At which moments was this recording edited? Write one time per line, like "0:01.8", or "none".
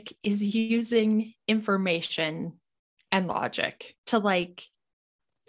0:03.9